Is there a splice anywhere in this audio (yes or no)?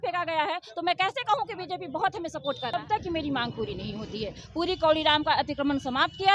yes